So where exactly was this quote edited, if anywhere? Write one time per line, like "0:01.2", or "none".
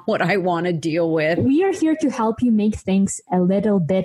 0:01.4